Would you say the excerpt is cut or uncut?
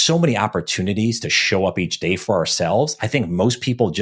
uncut